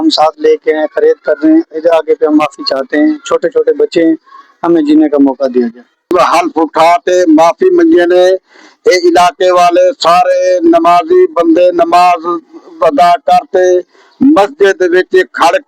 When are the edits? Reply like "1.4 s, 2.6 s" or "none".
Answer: 6.1 s